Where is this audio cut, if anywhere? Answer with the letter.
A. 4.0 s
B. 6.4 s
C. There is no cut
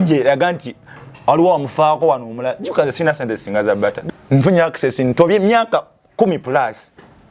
A